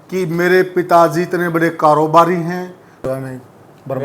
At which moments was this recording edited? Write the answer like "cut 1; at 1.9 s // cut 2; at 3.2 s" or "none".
cut 1; at 3.0 s